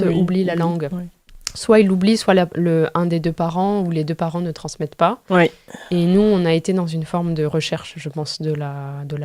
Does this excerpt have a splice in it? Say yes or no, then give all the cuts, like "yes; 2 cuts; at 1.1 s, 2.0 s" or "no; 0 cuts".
no; 0 cuts